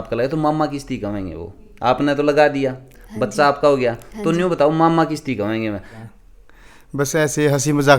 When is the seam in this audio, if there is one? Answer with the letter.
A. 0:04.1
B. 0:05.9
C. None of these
B